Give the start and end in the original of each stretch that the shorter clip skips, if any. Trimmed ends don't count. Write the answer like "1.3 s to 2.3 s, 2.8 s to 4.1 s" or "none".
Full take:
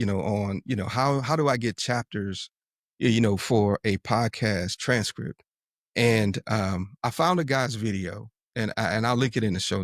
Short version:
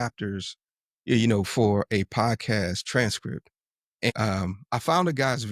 6.0 s to 6.4 s